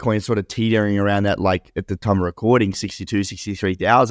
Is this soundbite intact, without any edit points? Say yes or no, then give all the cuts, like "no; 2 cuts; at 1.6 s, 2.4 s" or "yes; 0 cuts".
yes; 0 cuts